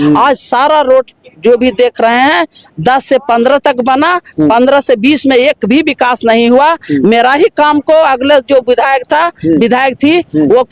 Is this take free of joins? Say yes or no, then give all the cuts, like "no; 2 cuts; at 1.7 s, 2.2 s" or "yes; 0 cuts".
yes; 0 cuts